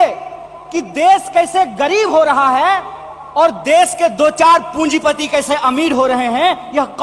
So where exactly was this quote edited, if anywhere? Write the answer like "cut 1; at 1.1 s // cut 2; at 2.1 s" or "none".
none